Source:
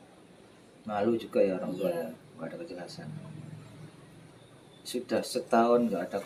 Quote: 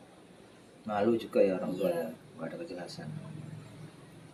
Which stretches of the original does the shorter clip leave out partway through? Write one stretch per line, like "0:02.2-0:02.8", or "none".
none